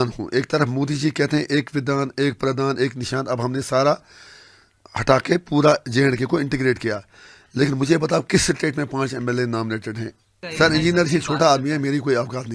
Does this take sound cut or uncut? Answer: cut